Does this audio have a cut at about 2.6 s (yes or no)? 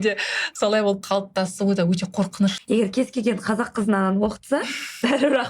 yes